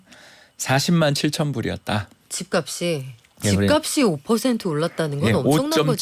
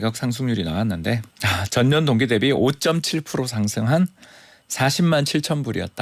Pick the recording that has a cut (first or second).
second